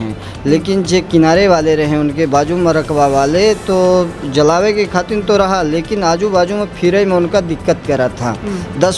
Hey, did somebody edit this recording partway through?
no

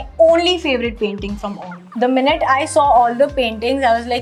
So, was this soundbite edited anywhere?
no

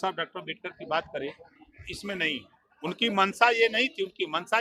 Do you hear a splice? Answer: no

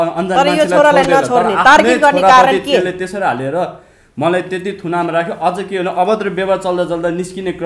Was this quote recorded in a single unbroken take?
yes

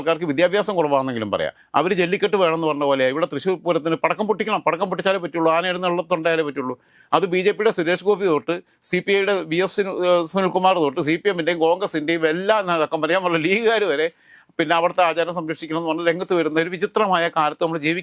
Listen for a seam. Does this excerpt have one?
no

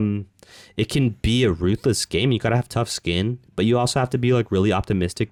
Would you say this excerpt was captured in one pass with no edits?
yes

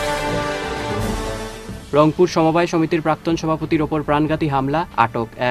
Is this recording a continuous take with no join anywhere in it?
no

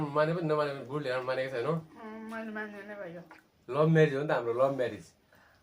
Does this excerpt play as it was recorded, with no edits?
no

